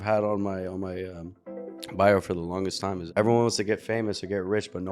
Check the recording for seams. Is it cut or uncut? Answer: cut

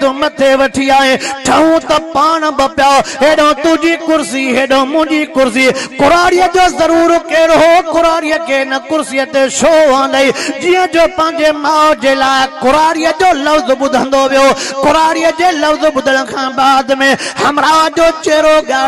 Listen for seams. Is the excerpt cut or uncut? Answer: uncut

